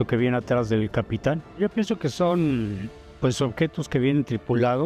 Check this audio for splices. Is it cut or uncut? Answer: cut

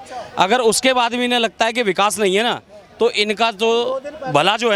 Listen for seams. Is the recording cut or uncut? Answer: uncut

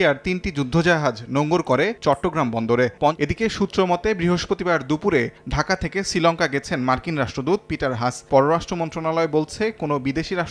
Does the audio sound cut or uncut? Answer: cut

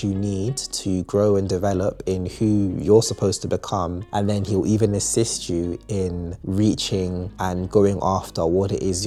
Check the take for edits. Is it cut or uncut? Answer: uncut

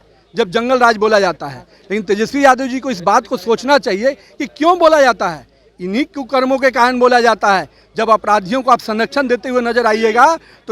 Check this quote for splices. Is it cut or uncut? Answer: uncut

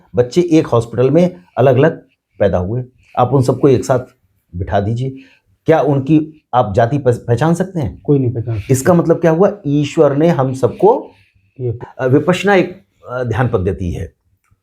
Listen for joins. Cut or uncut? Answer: cut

